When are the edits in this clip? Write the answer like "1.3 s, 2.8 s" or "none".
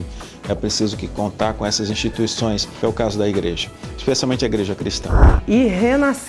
2.7 s, 5.3 s